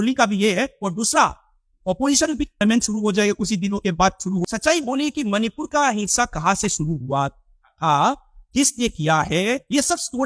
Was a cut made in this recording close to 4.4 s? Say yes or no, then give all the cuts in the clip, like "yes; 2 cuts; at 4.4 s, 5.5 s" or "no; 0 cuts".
yes; 2 cuts; at 2.6 s, 4.4 s